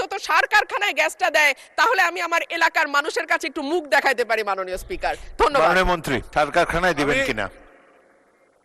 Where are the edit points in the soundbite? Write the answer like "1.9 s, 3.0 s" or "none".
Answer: 6.3 s